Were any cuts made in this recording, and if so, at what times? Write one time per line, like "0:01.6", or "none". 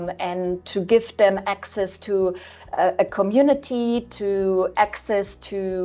none

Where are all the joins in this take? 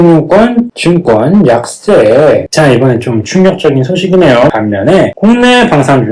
0:04.5

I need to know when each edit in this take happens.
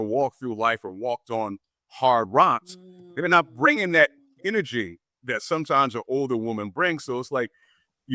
none

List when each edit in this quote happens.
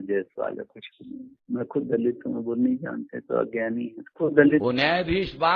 0:04.6

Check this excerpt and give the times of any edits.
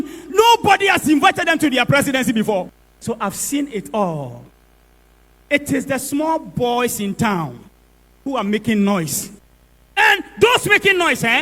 0:02.8

